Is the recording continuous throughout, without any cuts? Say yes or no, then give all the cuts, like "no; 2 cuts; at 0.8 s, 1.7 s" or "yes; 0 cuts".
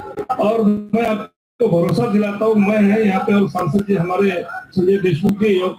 yes; 0 cuts